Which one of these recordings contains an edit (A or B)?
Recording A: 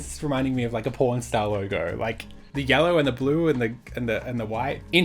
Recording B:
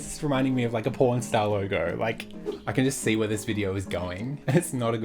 B